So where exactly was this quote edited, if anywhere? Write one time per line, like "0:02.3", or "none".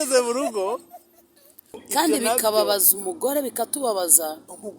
0:01.7